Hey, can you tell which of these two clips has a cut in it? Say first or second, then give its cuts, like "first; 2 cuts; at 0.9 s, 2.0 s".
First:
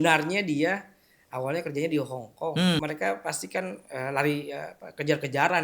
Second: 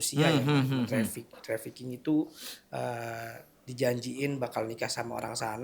first; 1 cut; at 2.8 s